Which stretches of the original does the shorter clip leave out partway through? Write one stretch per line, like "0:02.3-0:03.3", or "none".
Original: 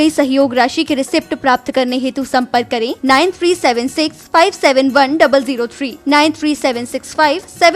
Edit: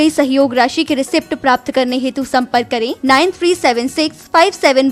none